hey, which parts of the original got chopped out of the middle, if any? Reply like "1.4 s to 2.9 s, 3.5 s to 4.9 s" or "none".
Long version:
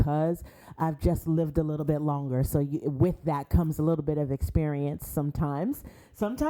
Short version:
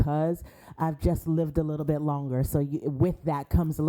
none